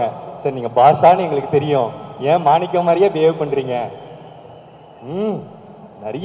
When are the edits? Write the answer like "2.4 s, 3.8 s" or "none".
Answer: none